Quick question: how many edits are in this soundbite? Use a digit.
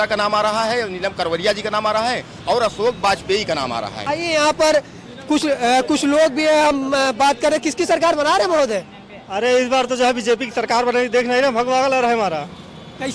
1